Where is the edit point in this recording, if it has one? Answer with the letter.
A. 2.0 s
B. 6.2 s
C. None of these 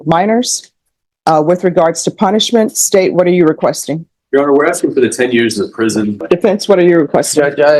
B